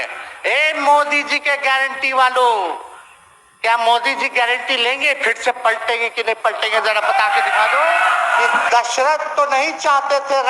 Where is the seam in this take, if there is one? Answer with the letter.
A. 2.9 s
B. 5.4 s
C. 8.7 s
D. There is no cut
C